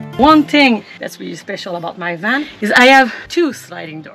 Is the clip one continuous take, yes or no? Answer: no